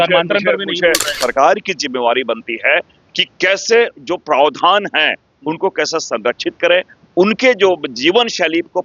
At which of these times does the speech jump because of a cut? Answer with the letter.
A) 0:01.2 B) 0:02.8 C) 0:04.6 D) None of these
A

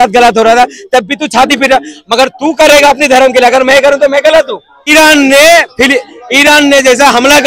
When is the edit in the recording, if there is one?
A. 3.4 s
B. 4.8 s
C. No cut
B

